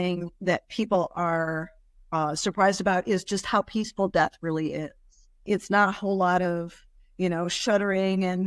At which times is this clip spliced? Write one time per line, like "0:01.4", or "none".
none